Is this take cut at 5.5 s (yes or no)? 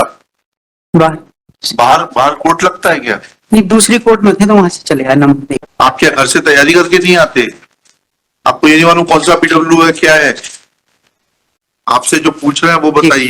yes